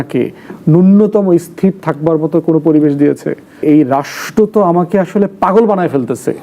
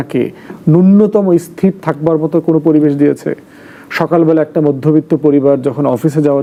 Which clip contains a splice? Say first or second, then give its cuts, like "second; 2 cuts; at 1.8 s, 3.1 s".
first; 1 cut; at 3.6 s